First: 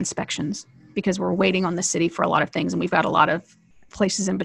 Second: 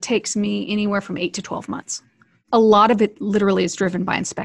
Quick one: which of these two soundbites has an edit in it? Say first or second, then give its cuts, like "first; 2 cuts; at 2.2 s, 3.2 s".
second; 1 cut; at 2.4 s